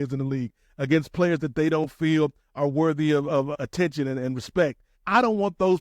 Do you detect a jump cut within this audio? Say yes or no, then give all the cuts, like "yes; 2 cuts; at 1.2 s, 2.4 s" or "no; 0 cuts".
yes; 2 cuts; at 3.5 s, 4.9 s